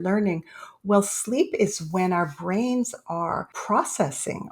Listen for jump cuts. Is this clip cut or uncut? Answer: cut